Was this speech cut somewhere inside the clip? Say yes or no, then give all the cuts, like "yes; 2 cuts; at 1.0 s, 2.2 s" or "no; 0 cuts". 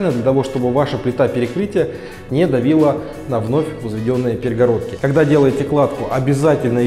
no; 0 cuts